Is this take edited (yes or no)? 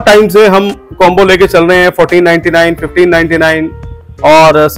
no